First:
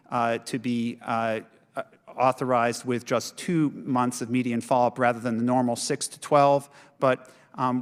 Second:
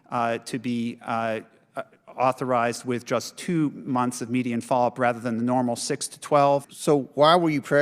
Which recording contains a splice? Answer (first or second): second